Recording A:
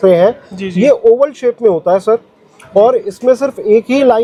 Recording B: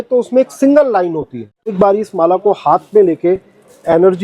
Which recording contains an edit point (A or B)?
B